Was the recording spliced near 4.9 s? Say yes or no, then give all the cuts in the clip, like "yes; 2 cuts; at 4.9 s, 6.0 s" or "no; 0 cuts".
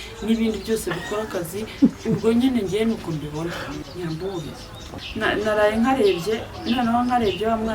yes; 2 cuts; at 3.8 s, 4.9 s